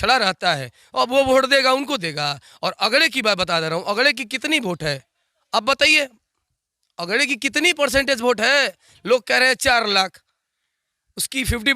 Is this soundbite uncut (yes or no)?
yes